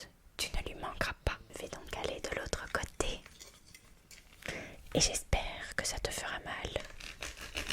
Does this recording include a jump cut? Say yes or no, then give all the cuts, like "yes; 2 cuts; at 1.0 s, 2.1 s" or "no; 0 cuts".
yes; 1 cut; at 1.4 s